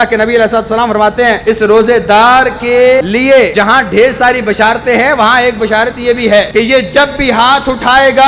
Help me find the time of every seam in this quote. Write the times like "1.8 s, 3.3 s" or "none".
1.4 s, 3.5 s, 6.5 s